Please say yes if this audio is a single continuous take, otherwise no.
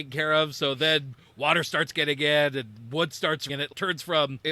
no